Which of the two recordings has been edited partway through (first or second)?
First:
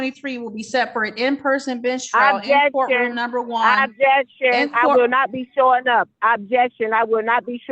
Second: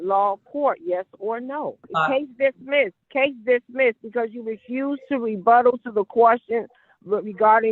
second